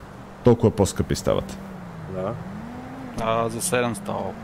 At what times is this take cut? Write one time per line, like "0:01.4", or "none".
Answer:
none